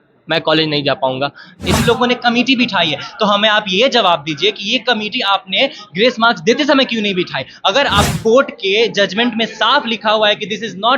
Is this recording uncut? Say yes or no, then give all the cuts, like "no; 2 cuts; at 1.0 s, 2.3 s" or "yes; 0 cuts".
no; 2 cuts; at 1.8 s, 8.1 s